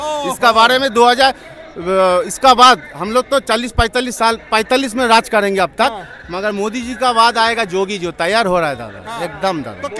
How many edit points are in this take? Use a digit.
0